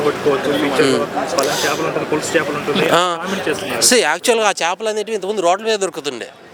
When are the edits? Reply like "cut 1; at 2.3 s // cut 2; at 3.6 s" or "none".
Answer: none